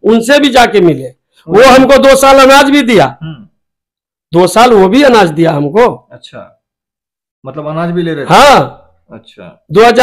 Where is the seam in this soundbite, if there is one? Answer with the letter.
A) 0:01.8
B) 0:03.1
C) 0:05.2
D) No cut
D